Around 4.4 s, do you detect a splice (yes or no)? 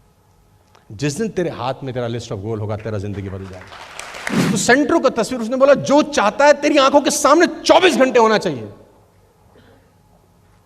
yes